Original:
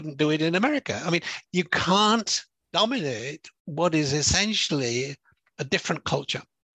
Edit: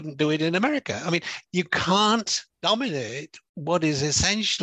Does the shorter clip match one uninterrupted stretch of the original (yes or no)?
no